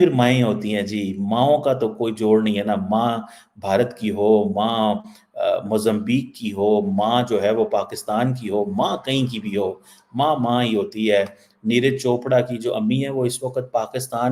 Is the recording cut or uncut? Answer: uncut